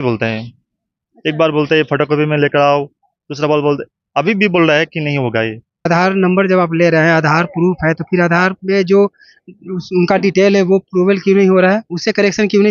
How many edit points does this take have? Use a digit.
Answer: 1